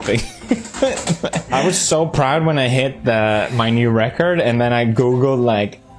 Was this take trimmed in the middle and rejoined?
yes; 1 cut; at 1.4 s

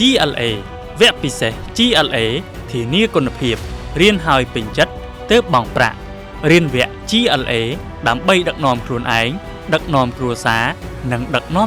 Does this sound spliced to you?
no; 0 cuts

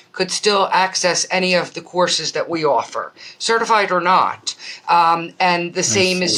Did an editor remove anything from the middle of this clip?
no; 0 cuts

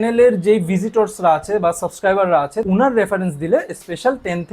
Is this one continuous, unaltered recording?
no; 1 cut; at 2.6 s

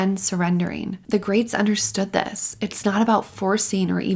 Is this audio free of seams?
no; 1 cut; at 0.9 s

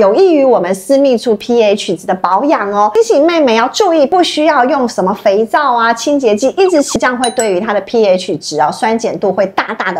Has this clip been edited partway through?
yes; 3 cuts; at 3.0 s, 4.1 s, 7.0 s

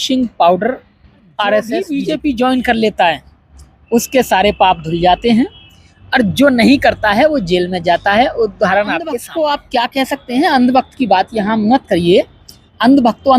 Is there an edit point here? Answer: yes; 2 cuts; at 1.9 s, 9.2 s

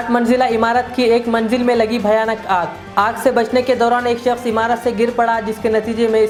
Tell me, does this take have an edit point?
no; 0 cuts

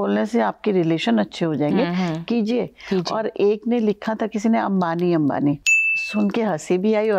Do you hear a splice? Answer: no; 0 cuts

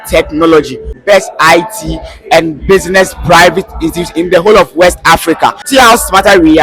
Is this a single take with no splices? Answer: no; 2 cuts; at 1.0 s, 5.6 s

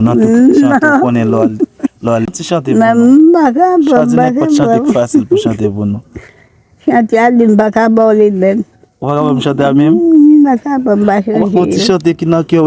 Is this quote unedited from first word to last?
no; 1 cut; at 2.2 s

